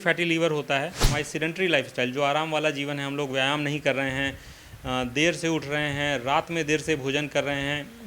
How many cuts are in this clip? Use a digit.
1